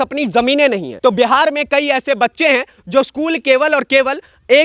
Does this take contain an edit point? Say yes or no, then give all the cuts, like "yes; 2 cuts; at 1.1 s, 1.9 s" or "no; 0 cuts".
yes; 1 cut; at 0.9 s